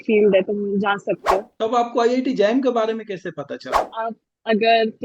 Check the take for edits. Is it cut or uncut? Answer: cut